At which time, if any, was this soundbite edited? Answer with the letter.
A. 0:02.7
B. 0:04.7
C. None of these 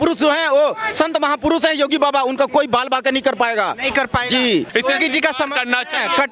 C